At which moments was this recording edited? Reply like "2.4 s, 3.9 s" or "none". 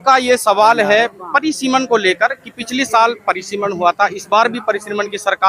none